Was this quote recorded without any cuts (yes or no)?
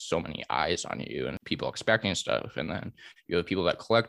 no